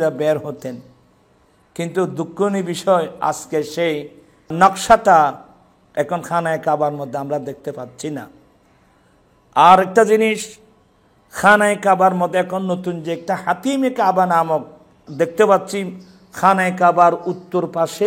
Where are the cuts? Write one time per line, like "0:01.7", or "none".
0:04.5
0:15.0